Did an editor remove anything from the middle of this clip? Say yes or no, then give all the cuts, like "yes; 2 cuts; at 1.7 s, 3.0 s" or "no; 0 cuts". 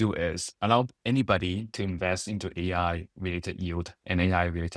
no; 0 cuts